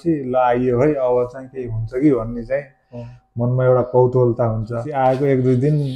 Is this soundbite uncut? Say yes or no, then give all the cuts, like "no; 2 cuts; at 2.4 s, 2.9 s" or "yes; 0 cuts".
yes; 0 cuts